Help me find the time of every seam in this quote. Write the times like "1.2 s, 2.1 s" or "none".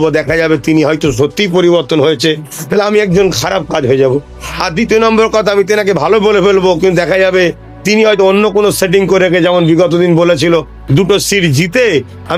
none